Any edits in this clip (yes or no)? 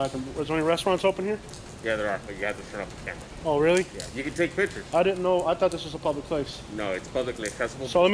no